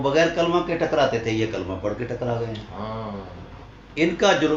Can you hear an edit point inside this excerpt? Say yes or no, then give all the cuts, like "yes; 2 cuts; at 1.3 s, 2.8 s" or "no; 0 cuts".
no; 0 cuts